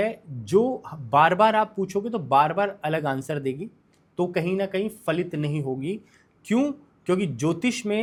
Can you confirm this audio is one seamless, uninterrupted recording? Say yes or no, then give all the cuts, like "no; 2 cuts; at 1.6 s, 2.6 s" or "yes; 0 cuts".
yes; 0 cuts